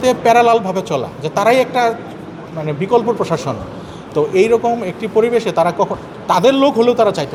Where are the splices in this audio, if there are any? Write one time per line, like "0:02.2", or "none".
none